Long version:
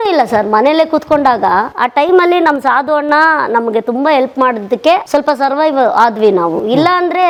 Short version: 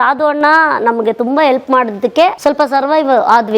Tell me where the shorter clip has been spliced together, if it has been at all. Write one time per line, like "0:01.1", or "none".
none